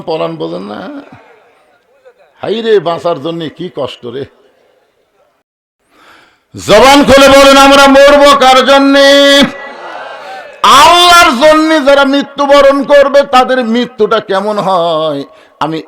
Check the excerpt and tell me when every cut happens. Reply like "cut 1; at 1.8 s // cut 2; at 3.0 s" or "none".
cut 1; at 5.4 s